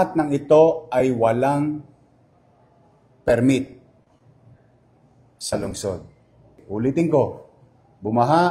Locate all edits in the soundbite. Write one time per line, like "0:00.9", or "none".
0:06.6